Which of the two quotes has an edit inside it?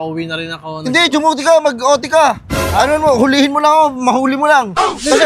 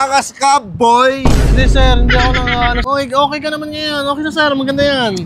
second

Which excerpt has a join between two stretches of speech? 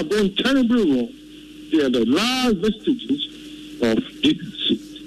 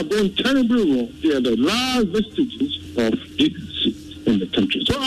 second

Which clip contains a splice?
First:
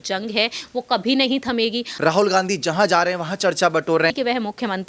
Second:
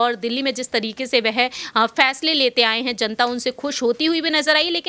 first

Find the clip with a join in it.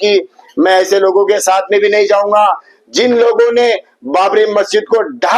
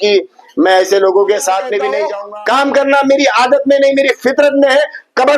second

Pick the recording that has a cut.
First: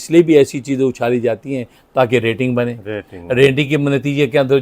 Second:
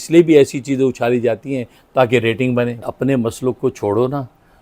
second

